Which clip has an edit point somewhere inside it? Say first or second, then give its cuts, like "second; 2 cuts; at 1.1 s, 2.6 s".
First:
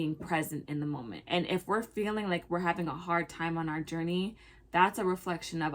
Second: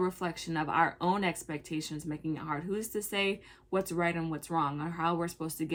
first; 1 cut; at 1.1 s